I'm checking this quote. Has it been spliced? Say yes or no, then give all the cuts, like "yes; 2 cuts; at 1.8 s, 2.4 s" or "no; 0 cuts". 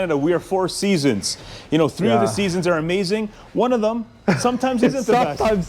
no; 0 cuts